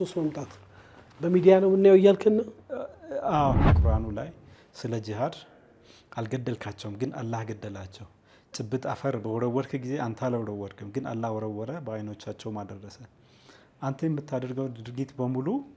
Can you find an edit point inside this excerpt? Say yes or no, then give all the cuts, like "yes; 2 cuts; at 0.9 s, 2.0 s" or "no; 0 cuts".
yes; 1 cut; at 3.7 s